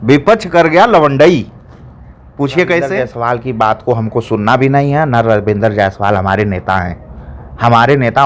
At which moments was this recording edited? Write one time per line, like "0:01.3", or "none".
0:03.1